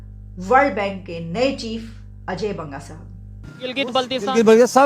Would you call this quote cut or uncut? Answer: cut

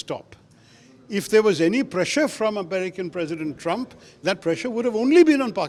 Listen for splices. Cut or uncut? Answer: uncut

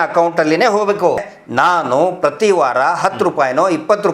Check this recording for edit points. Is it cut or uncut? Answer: cut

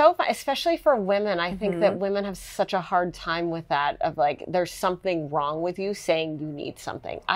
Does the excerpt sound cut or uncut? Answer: uncut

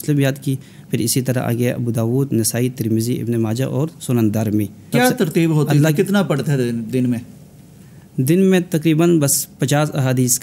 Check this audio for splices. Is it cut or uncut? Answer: uncut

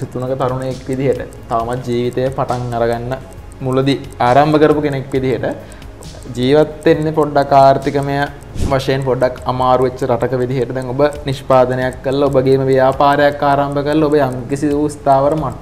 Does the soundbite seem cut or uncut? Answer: uncut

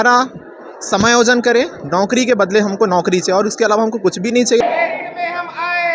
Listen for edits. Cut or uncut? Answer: cut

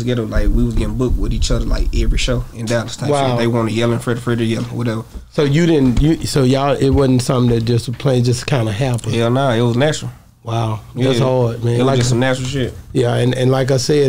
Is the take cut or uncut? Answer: uncut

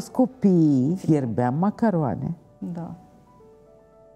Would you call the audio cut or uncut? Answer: cut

